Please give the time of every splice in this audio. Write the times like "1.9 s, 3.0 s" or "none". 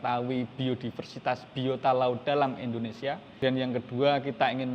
3.3 s